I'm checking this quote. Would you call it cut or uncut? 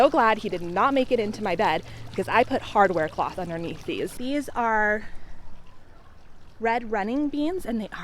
cut